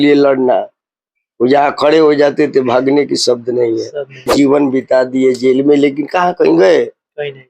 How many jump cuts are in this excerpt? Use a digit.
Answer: 1